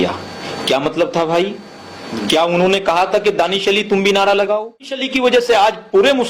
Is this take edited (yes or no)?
yes